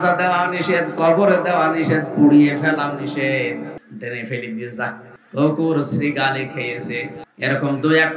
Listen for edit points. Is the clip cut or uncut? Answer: cut